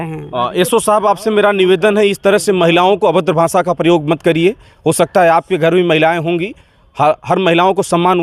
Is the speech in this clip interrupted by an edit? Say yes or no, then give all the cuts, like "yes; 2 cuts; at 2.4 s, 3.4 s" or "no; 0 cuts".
no; 0 cuts